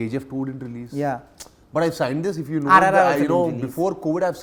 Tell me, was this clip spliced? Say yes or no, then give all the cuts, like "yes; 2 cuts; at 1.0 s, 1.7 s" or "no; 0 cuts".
no; 0 cuts